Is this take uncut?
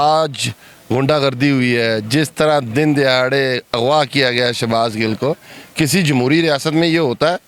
yes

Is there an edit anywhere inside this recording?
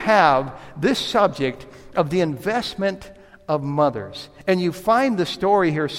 no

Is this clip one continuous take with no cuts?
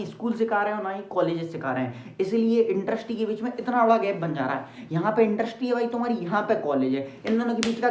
yes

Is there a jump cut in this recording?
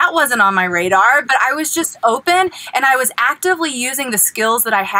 no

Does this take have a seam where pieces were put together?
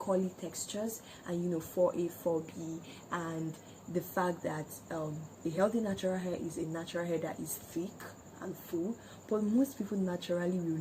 no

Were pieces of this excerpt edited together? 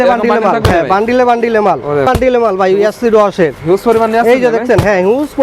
yes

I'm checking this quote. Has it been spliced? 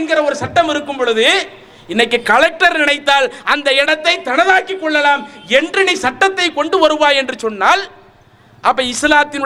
no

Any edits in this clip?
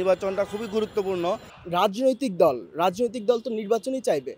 yes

